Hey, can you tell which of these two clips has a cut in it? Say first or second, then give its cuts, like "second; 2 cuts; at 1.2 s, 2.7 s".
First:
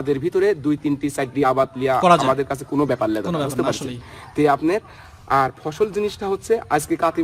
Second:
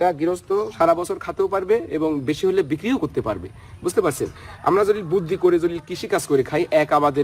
first; 1 cut; at 1.9 s